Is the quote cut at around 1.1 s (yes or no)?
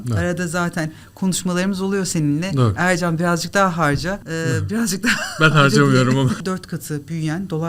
no